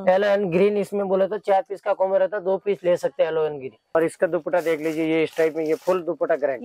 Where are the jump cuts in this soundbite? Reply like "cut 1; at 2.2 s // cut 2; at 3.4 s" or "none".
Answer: cut 1; at 3.7 s